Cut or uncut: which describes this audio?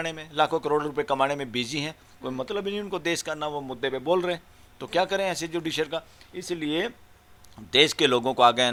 uncut